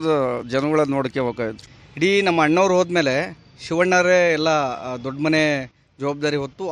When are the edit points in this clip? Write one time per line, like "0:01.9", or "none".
0:01.6